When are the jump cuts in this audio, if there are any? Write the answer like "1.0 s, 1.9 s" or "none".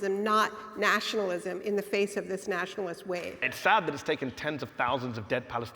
3.5 s